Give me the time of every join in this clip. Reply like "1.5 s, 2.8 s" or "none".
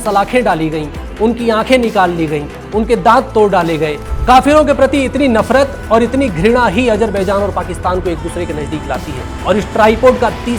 4.1 s, 9.3 s